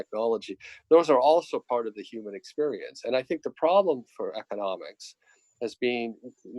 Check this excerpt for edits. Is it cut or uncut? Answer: uncut